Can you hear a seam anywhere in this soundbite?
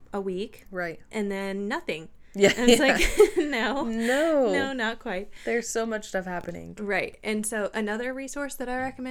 no; 0 cuts

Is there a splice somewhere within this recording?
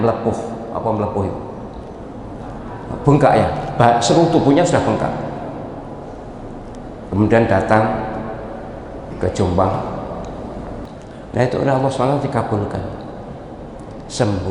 yes; 1 cut; at 10.9 s

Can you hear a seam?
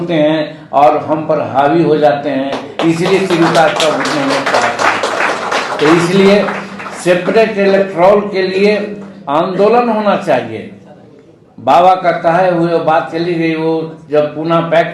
no; 0 cuts

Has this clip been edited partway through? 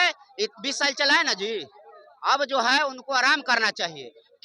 no; 0 cuts

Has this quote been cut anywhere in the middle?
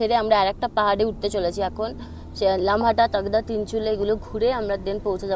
no; 0 cuts

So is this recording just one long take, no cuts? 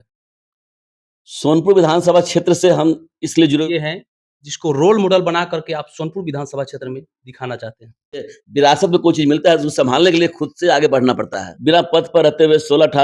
no; 3 cuts; at 3.6 s, 8.4 s, 11.5 s

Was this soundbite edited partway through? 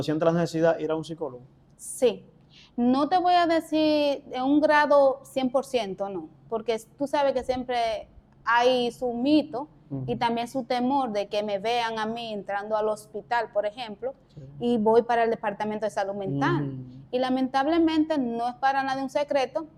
no; 0 cuts

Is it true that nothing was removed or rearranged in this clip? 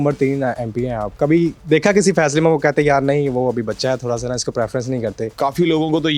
no; 2 cuts; at 1.1 s, 5.3 s

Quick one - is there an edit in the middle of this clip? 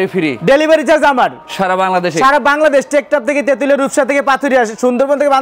no; 0 cuts

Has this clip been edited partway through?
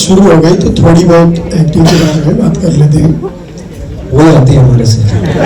no; 0 cuts

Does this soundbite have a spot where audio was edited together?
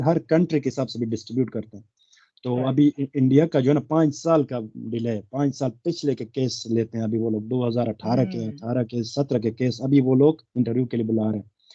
no; 0 cuts

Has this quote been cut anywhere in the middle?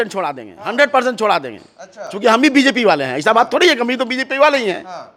no; 0 cuts

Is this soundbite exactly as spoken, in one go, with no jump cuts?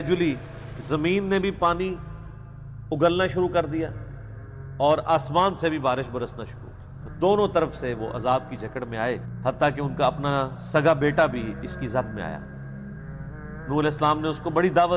no; 1 cut; at 9.4 s

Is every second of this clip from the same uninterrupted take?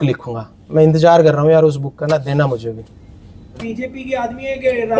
no; 1 cut; at 3.6 s

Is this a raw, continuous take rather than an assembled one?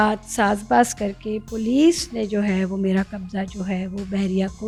yes; 0 cuts

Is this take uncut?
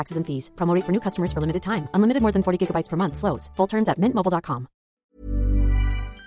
no; 1 cut; at 5.0 s

